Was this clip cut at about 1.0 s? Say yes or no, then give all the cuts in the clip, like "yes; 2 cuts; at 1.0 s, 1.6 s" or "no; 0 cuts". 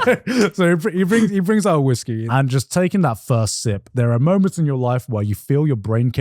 no; 2 cuts; at 2.2 s, 3.9 s